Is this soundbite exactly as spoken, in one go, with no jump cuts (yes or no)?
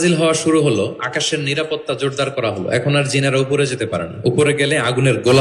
yes